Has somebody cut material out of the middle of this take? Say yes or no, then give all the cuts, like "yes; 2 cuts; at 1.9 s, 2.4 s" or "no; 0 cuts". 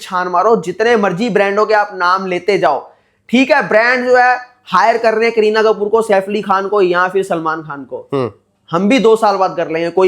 no; 0 cuts